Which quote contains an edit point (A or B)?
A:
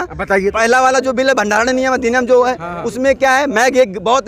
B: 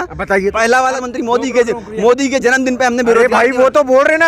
B